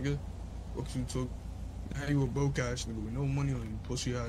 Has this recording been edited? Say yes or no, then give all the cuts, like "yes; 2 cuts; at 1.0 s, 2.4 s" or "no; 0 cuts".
no; 0 cuts